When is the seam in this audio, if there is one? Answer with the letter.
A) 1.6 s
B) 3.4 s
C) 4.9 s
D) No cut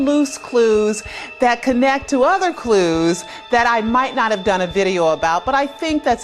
A